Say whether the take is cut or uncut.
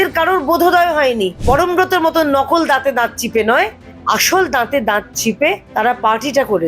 cut